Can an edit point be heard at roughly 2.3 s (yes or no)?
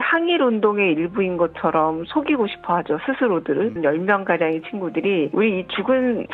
no